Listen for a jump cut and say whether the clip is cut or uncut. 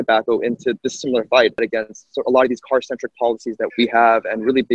cut